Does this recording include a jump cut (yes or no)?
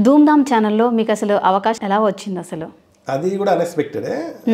yes